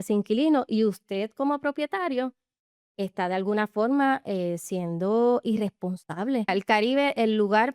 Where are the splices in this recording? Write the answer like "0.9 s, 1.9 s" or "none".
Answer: 6.5 s